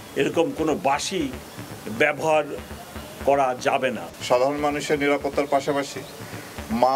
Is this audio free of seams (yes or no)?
no